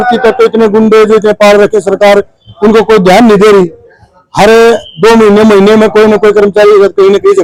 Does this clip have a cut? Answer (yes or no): no